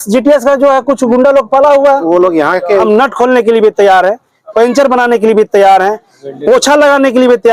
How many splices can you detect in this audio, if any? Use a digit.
1